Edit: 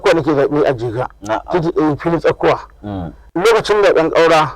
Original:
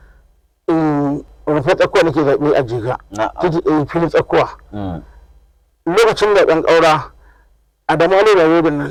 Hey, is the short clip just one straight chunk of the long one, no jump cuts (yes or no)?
no